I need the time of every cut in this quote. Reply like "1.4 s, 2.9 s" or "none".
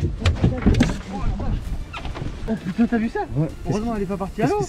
2.5 s